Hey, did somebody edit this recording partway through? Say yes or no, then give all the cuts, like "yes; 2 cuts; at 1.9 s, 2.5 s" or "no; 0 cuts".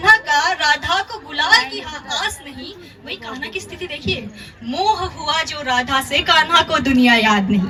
no; 0 cuts